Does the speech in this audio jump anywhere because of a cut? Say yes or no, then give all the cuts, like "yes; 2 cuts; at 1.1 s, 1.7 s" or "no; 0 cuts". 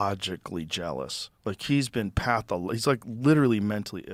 no; 0 cuts